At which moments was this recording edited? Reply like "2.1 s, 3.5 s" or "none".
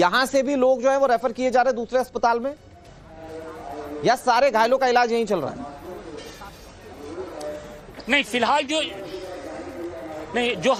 none